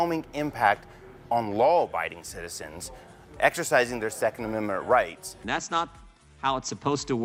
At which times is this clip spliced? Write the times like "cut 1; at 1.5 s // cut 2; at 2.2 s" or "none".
none